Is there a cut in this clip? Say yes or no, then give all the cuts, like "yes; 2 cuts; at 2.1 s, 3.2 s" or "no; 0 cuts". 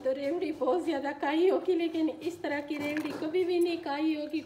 no; 0 cuts